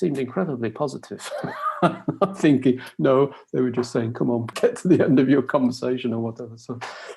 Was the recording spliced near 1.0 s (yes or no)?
no